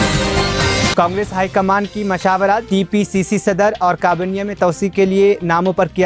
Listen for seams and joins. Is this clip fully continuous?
yes; 0 cuts

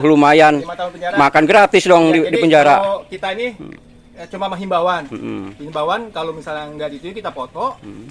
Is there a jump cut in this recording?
no; 0 cuts

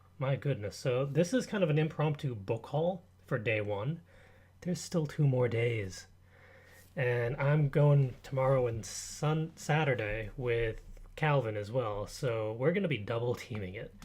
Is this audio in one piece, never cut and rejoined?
no; 1 cut; at 10.3 s

